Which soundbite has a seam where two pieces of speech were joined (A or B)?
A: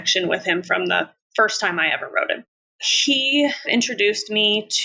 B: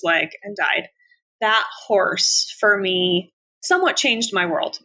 A